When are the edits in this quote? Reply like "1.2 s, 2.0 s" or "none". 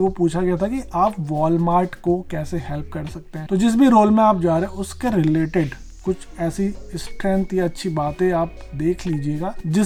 none